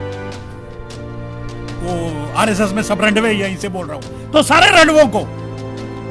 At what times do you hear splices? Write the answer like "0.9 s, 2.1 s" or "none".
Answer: none